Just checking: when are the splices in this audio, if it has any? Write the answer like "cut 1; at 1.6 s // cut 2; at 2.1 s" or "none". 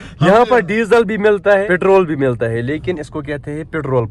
cut 1; at 1.6 s